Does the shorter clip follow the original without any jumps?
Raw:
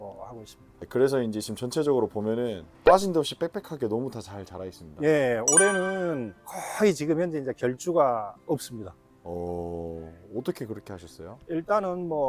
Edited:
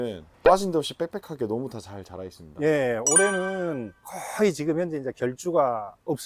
yes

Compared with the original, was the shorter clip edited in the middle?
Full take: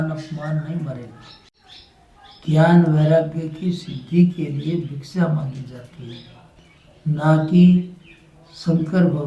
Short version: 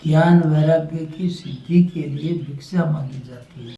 no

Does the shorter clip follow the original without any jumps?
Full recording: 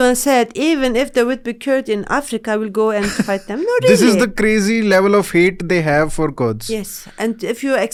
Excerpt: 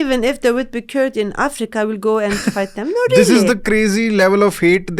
yes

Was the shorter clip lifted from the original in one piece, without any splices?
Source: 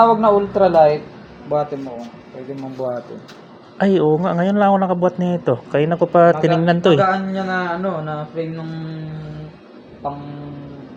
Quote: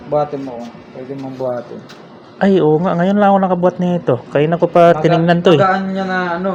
yes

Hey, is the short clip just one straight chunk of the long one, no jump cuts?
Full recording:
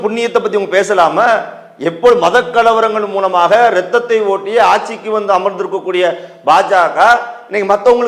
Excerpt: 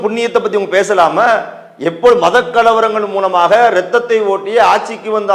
yes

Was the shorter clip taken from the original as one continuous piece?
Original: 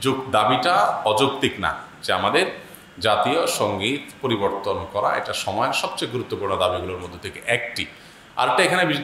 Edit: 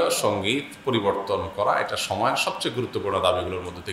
yes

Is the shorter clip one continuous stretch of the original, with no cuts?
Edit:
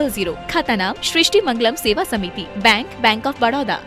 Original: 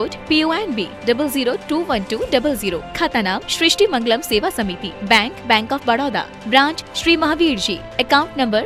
yes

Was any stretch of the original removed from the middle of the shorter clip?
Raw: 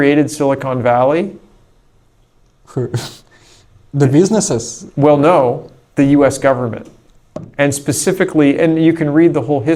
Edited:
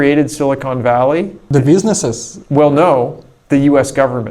yes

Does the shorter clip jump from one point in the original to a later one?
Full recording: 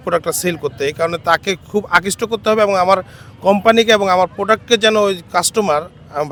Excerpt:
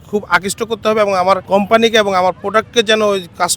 yes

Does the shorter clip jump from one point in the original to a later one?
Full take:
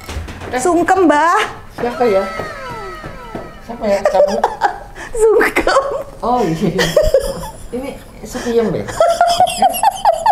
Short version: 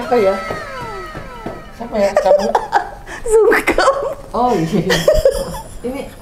no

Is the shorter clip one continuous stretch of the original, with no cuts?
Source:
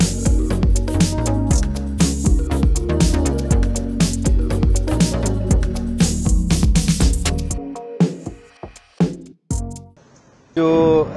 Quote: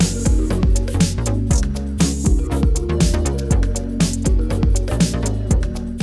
yes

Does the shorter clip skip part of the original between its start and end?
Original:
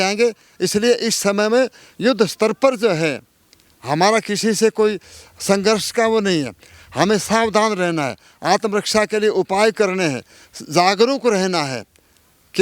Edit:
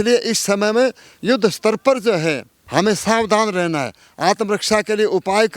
yes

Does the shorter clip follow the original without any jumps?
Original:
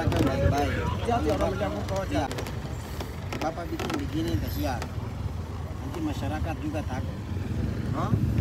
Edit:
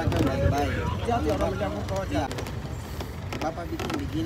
yes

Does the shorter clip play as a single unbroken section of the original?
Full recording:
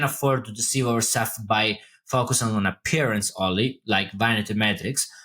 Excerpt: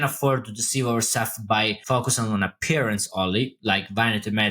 no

